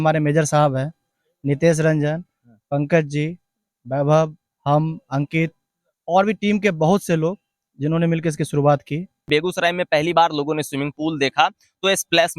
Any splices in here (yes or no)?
yes